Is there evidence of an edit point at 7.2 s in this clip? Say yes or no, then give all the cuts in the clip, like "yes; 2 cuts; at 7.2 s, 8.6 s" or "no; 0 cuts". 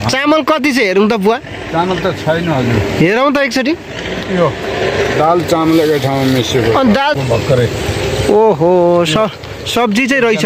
yes; 1 cut; at 7.2 s